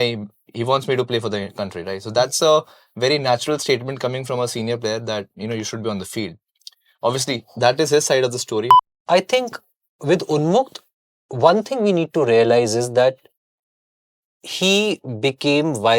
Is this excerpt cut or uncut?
cut